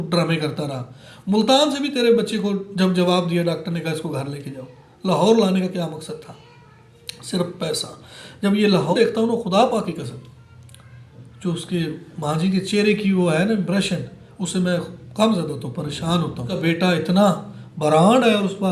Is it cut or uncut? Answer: cut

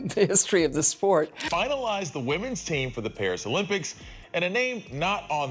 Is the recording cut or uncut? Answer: cut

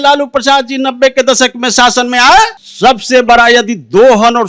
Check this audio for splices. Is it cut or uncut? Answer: cut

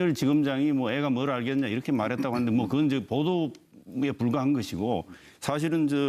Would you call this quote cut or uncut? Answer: cut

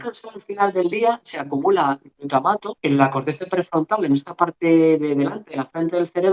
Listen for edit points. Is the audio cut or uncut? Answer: cut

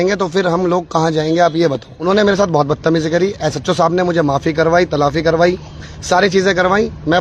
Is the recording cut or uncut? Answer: cut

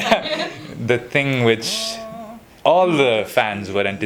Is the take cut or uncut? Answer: uncut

